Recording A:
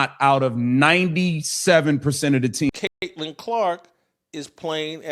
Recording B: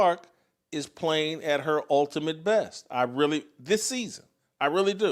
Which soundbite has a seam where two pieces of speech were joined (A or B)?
A